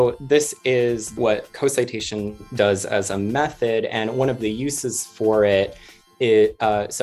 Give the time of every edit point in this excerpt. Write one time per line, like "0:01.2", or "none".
0:01.2